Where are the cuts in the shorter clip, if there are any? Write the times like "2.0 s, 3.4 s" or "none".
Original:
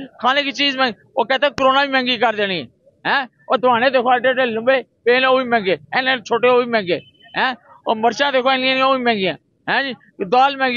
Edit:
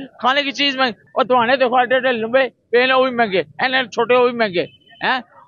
1.0 s